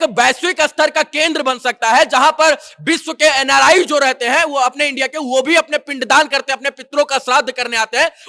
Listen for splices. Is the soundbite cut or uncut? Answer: uncut